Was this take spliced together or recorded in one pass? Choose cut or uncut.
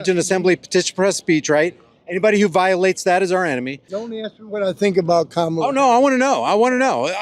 cut